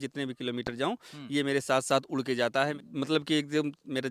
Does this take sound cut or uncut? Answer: cut